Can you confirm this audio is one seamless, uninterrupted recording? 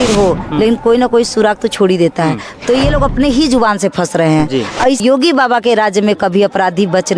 no; 1 cut; at 5.0 s

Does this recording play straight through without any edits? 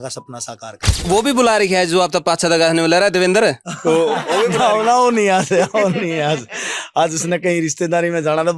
no; 1 cut; at 1.0 s

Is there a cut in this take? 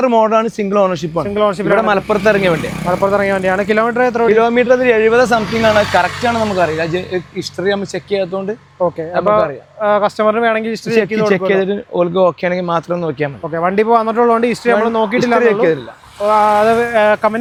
no; 0 cuts

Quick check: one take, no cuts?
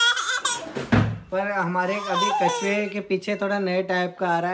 yes; 0 cuts

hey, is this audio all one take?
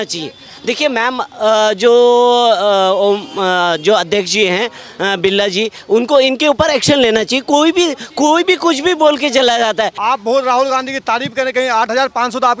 no; 1 cut; at 9.9 s

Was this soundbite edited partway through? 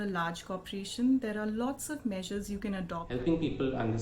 yes; 1 cut; at 2.6 s

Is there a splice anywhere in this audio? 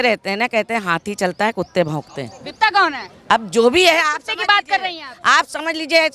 no; 0 cuts

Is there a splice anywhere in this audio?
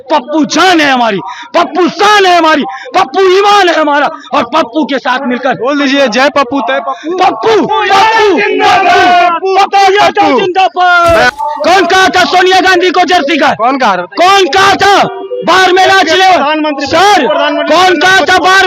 yes; 1 cut; at 11.3 s

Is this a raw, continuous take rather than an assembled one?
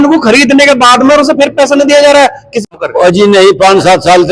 no; 1 cut; at 2.7 s

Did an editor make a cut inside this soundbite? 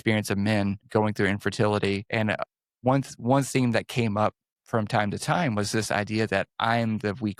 yes; 3 cuts; at 0.8 s, 2.6 s, 4.5 s

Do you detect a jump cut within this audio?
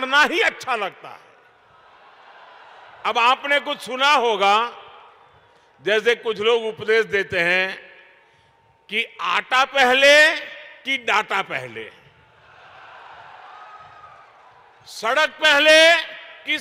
no; 0 cuts

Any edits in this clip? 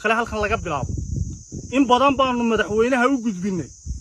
no; 0 cuts

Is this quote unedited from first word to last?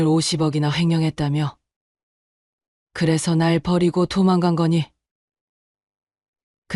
yes; 0 cuts

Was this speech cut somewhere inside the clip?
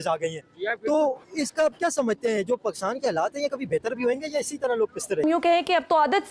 yes; 1 cut; at 5.2 s

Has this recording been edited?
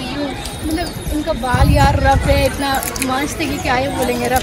no; 0 cuts

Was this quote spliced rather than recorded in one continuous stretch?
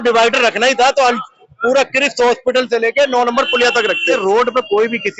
yes; 1 cut; at 4.0 s

